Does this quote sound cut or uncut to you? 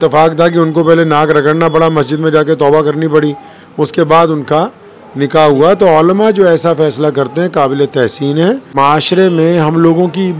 cut